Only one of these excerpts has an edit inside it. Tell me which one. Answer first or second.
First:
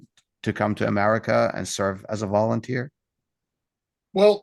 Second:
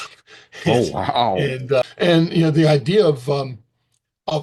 second